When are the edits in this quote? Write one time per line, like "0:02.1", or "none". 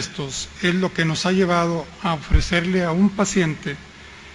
0:01.2